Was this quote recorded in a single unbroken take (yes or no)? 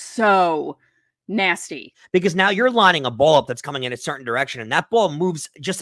no